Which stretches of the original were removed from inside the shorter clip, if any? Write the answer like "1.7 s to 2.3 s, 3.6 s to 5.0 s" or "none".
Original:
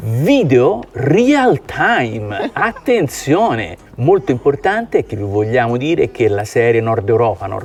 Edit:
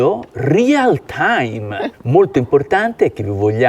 2.5 s to 3.8 s